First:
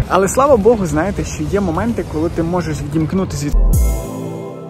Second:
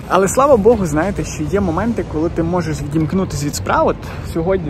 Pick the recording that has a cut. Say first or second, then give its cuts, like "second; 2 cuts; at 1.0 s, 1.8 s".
first; 1 cut; at 3.6 s